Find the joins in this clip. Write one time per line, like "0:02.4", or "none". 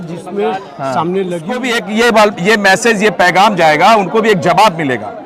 0:01.6